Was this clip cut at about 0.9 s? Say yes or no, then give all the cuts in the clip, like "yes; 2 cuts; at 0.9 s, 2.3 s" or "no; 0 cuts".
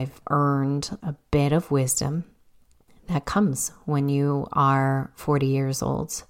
yes; 1 cut; at 0.9 s